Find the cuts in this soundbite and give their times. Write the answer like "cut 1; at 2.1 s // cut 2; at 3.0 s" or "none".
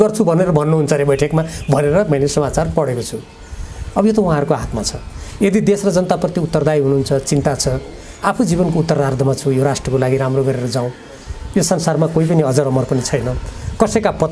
none